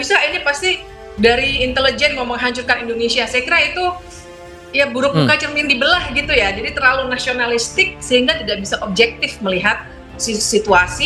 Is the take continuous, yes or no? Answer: yes